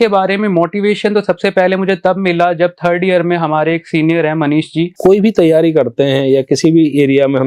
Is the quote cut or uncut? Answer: cut